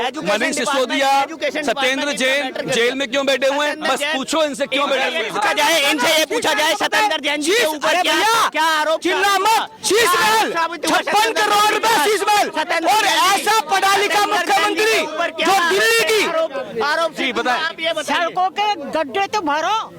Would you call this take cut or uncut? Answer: uncut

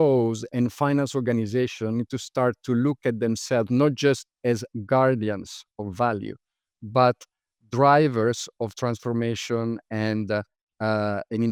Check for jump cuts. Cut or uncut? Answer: uncut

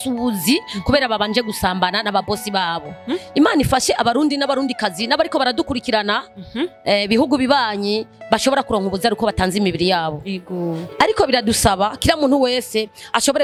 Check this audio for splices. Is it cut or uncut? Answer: uncut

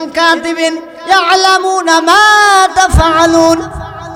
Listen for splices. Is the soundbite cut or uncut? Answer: uncut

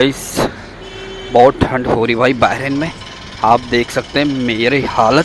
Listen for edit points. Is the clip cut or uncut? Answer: uncut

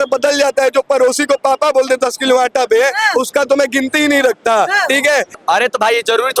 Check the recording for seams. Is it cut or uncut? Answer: cut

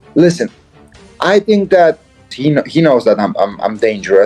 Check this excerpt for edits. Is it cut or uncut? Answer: cut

